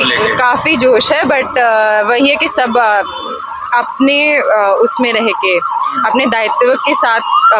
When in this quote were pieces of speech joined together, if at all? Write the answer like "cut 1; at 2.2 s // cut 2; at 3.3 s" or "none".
none